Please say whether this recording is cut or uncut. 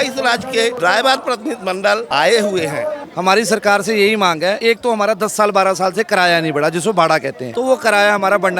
cut